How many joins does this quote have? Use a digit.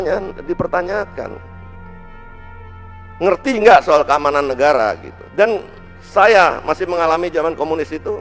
0